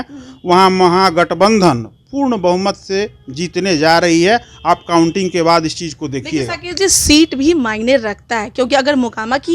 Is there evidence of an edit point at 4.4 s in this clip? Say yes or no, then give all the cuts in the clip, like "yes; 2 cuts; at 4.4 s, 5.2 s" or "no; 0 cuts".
no; 0 cuts